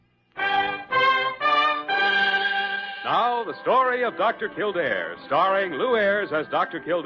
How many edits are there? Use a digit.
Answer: 1